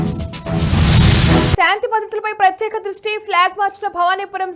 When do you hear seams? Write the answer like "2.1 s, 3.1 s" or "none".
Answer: 1.5 s